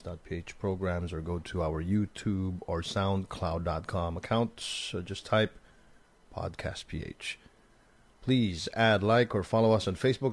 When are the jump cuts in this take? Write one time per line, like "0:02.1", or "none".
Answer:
0:01.8